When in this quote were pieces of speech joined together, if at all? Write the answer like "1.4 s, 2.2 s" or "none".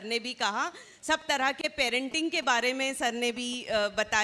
none